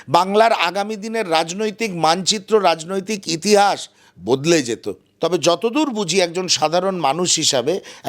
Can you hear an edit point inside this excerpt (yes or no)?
yes